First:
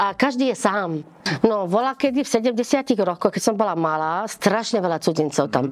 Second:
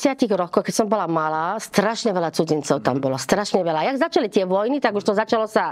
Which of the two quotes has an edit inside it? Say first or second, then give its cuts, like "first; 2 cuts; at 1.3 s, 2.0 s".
first; 1 cut; at 1.3 s